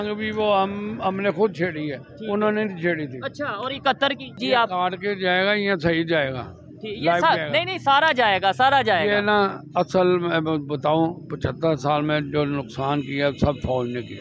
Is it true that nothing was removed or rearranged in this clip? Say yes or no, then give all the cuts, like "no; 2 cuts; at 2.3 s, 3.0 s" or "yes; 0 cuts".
no; 1 cut; at 4.4 s